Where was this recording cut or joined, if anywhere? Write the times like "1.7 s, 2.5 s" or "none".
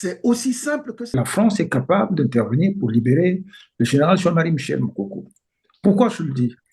1.2 s